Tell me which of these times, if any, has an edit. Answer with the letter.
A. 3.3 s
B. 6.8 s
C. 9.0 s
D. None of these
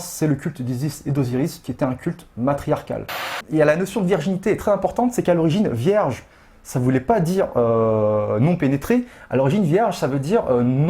A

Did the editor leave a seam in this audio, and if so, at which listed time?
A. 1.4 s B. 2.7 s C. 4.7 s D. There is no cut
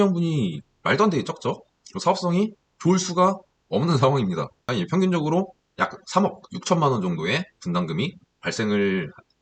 C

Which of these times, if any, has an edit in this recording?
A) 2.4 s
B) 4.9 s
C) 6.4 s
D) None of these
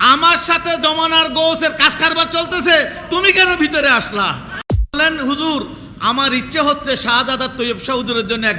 B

